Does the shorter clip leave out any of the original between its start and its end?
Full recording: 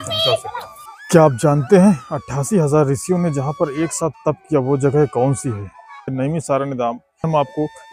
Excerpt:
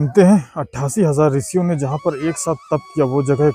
no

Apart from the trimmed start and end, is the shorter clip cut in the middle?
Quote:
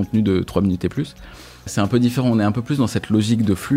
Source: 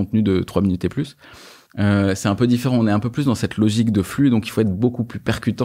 yes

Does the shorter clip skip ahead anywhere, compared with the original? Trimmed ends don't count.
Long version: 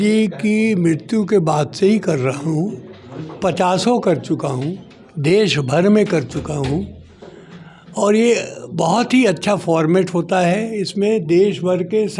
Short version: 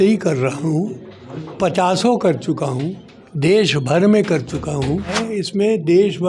yes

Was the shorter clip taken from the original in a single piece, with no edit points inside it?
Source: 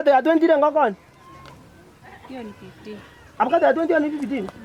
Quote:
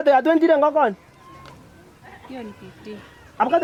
yes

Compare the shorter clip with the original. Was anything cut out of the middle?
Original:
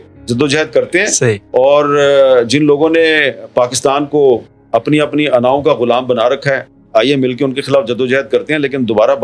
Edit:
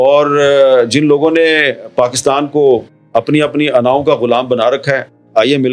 no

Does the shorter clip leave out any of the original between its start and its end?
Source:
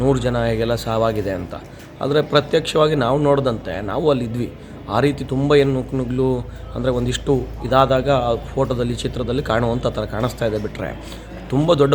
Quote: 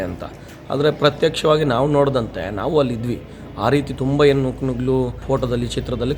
yes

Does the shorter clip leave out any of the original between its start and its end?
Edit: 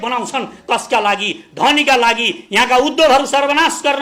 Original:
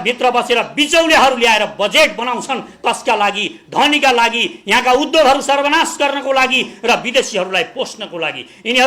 no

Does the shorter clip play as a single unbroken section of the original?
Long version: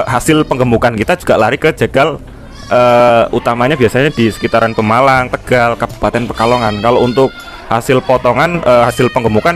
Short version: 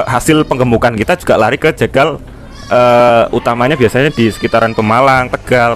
yes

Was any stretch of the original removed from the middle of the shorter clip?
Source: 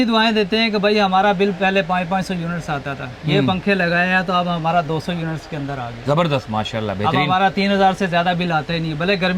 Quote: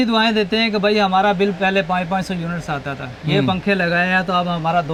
no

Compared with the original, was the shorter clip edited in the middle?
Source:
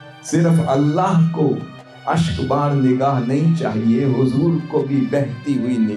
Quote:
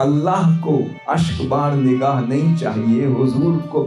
yes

